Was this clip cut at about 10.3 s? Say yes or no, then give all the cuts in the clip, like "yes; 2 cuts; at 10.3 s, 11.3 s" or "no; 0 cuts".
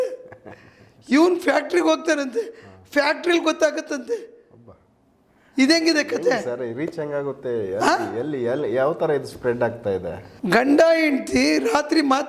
yes; 1 cut; at 10.3 s